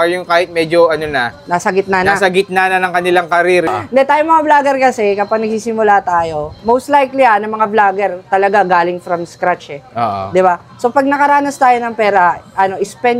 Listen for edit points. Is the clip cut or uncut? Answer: cut